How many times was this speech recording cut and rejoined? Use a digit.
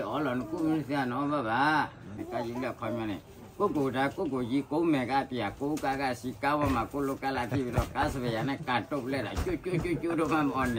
1